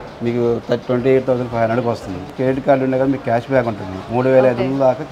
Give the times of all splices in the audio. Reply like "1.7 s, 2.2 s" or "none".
2.3 s